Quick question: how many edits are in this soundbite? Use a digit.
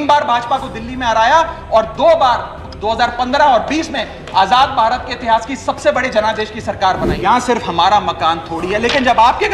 1